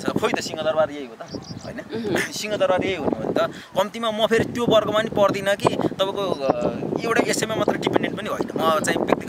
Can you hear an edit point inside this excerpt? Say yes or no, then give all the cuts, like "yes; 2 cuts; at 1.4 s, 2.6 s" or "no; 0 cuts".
no; 0 cuts